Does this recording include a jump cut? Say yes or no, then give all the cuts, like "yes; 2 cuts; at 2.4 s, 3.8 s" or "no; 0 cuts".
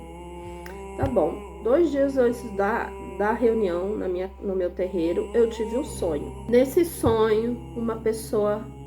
yes; 1 cut; at 6.3 s